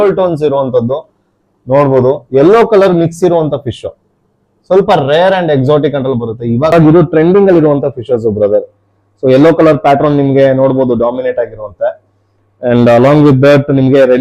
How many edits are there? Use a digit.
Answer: 1